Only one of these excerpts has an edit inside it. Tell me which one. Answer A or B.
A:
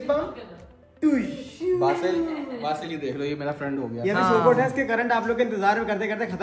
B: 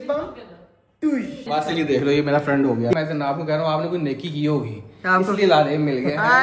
B